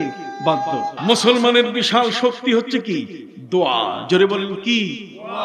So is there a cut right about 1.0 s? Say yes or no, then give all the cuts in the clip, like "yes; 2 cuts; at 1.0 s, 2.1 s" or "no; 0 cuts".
yes; 1 cut; at 1.0 s